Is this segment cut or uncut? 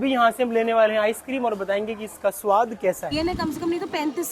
cut